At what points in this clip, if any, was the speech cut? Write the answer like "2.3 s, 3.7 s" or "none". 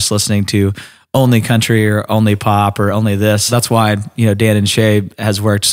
3.5 s